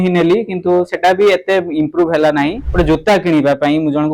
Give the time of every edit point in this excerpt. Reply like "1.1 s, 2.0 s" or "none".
2.6 s